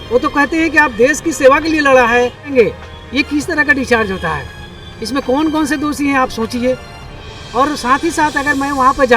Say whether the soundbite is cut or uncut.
cut